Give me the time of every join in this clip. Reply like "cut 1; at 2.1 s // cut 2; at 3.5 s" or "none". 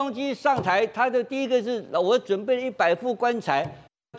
none